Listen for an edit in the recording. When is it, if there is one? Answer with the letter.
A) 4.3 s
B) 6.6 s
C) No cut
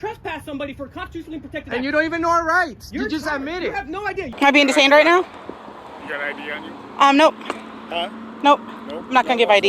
A